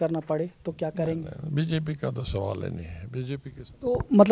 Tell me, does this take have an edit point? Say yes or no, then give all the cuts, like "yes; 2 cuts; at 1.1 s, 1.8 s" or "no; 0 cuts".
yes; 1 cut; at 3.4 s